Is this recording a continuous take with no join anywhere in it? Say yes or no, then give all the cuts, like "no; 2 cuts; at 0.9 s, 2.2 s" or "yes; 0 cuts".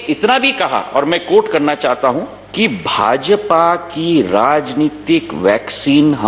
no; 1 cut; at 2.4 s